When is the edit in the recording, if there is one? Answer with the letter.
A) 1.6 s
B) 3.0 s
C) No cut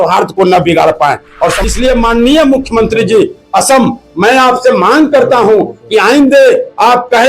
A